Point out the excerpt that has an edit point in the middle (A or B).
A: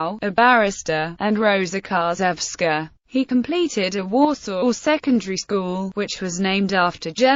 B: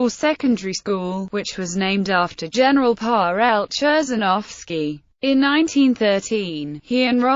B